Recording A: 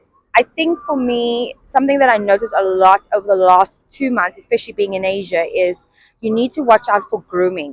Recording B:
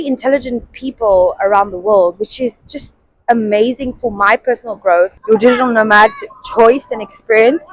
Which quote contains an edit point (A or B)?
B